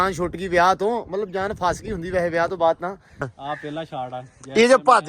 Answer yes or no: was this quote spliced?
yes